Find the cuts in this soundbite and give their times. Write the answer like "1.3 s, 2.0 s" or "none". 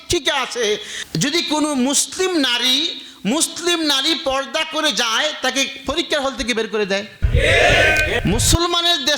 8.2 s